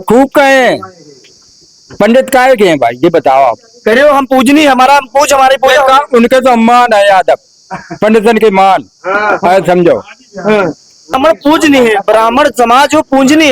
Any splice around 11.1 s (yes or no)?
yes